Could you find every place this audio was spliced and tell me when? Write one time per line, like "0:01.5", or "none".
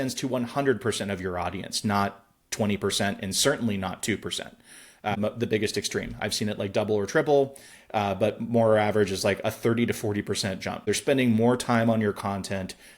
0:05.2
0:10.9